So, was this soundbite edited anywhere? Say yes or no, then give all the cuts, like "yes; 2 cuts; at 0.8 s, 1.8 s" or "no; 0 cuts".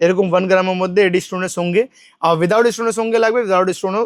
no; 0 cuts